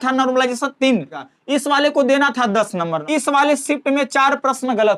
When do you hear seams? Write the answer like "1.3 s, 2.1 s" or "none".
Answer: 1.3 s, 3.0 s